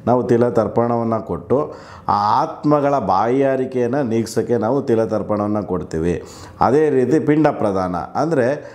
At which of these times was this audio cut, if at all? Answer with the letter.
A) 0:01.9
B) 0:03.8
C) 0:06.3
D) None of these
D